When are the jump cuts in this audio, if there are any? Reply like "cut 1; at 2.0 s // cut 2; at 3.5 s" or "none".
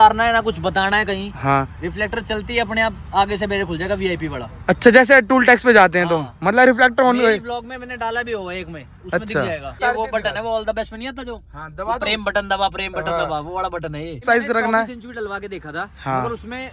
cut 1; at 9.7 s // cut 2; at 14.2 s